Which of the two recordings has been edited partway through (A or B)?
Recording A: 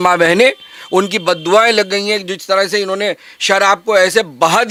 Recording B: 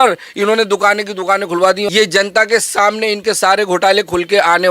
B